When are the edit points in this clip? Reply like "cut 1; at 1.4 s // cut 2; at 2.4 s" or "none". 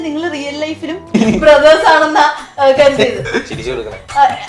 cut 1; at 1.1 s